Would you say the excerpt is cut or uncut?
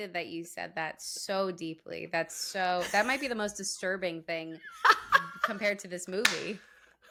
uncut